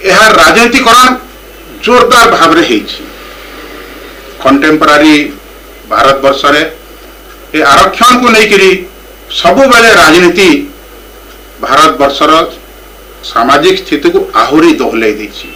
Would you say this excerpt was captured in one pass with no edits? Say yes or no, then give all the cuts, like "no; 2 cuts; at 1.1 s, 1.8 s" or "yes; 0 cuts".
yes; 0 cuts